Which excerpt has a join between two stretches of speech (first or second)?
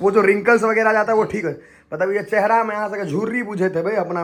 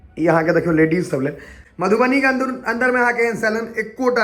second